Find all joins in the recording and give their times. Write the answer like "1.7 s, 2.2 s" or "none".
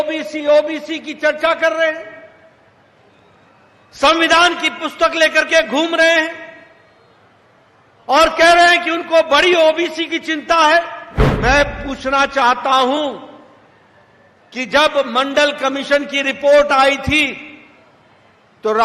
11.3 s